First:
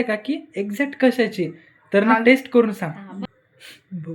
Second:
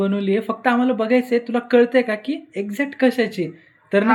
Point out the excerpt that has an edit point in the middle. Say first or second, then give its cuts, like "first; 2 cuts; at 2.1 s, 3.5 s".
first; 1 cut; at 3.1 s